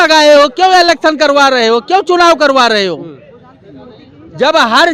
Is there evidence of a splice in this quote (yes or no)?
no